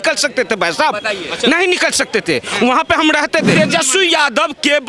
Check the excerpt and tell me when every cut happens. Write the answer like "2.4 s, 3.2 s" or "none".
3.6 s